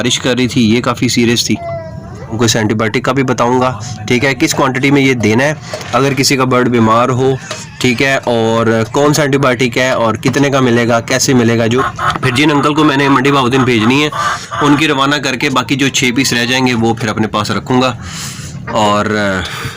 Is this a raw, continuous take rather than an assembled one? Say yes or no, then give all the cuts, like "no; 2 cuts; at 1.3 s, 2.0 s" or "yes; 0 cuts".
no; 2 cuts; at 2.4 s, 11.8 s